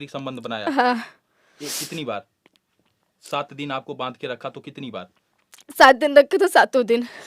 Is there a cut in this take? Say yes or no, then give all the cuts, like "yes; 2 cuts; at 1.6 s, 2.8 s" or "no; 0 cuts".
no; 0 cuts